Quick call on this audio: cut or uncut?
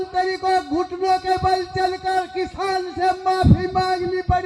uncut